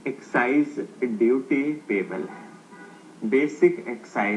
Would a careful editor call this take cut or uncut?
cut